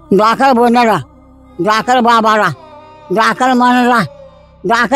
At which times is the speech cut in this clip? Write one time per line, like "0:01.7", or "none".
none